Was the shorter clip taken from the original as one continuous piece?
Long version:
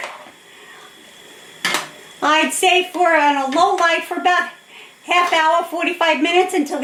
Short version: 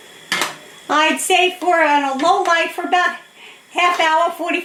yes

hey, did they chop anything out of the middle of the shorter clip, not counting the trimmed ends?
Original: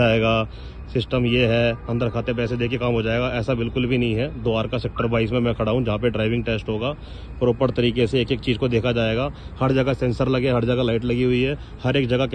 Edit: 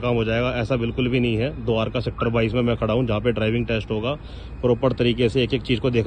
no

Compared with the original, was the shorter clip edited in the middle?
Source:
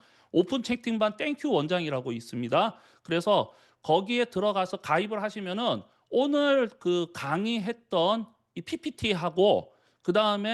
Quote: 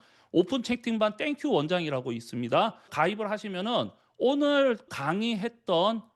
yes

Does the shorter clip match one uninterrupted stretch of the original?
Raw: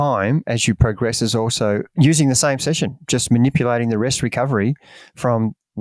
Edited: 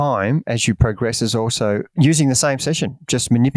yes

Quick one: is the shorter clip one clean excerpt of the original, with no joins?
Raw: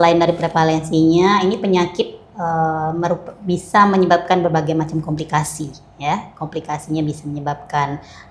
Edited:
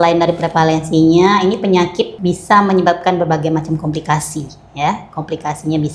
no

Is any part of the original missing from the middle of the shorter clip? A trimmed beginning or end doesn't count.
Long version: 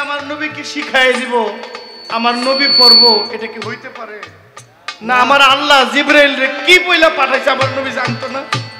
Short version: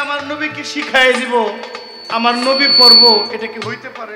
no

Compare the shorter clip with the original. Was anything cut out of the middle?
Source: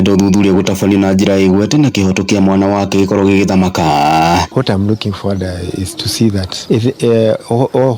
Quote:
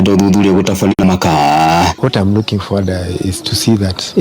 yes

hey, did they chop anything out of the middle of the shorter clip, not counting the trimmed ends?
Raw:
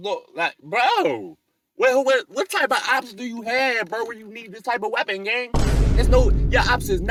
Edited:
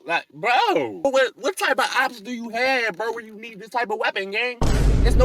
yes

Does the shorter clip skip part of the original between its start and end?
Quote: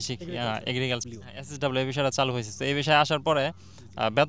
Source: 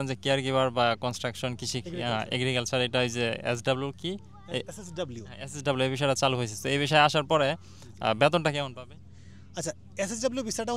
yes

